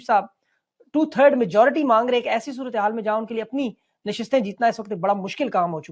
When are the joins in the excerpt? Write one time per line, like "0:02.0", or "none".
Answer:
none